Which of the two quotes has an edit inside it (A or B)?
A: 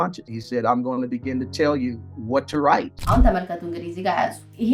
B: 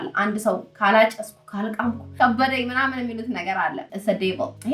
B